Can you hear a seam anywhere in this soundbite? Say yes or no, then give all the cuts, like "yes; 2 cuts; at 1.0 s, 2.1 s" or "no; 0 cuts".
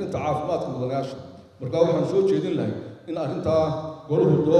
no; 0 cuts